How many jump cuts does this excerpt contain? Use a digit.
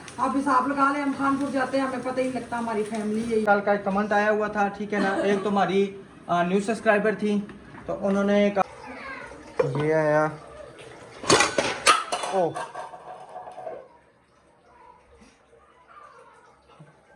2